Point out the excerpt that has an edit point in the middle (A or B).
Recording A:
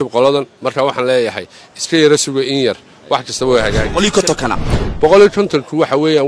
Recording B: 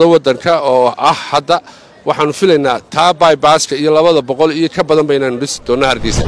A